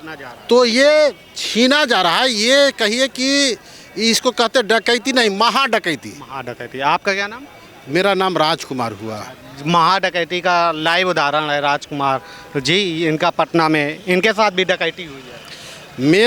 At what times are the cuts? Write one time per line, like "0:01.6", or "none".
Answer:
none